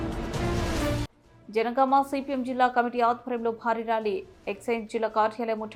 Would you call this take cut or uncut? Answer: uncut